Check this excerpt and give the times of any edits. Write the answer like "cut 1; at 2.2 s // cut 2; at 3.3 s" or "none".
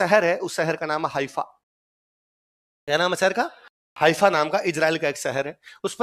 none